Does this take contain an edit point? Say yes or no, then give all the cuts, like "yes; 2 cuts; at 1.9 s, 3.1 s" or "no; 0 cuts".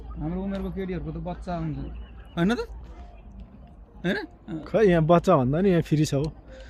no; 0 cuts